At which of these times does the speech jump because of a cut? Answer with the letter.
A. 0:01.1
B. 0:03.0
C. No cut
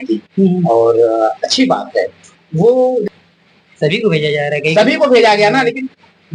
B